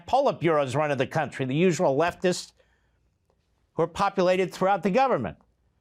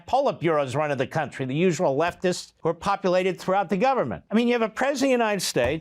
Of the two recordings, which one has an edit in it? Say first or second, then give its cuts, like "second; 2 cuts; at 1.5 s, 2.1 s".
second; 2 cuts; at 2.5 s, 4.2 s